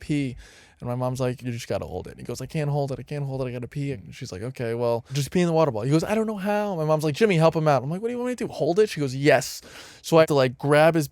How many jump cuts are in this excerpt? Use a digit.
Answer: 4